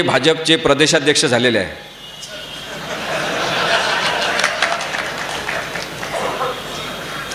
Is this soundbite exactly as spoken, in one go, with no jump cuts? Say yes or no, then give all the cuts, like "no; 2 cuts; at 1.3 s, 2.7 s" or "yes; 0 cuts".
yes; 0 cuts